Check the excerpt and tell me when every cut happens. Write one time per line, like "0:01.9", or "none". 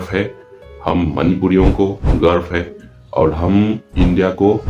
none